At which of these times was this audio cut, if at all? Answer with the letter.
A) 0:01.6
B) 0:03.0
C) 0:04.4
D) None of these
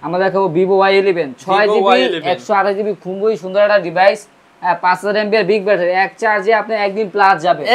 D